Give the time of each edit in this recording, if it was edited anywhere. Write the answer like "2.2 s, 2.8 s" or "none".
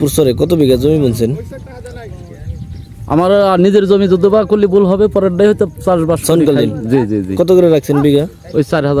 none

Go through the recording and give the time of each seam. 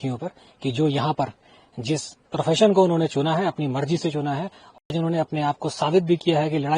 4.9 s

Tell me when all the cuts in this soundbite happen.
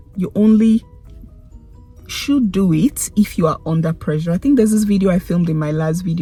none

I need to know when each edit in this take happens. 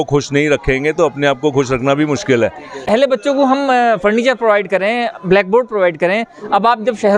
2.9 s

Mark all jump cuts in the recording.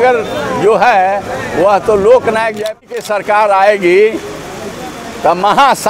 2.8 s

